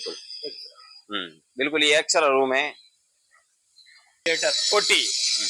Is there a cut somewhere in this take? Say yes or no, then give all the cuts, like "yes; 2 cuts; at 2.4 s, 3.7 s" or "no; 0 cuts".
no; 0 cuts